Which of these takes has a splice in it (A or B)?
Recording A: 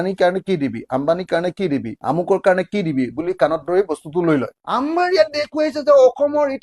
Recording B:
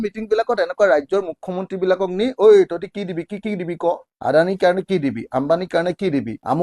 A